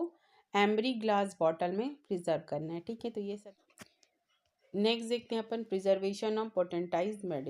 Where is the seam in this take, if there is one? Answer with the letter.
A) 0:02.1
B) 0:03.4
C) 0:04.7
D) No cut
B